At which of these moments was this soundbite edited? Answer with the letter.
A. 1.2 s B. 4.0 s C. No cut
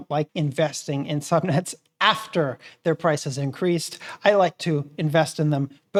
C